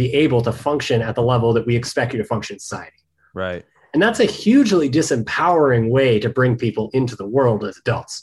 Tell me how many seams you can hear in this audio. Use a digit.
0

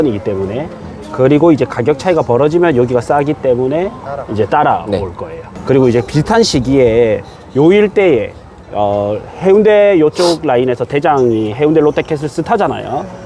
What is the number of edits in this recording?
0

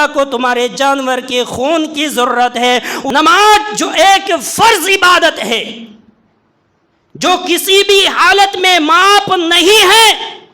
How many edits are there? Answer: 1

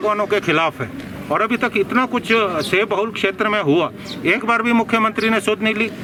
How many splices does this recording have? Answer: 0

